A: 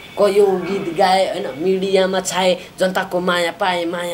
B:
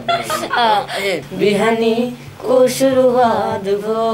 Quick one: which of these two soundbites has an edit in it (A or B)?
B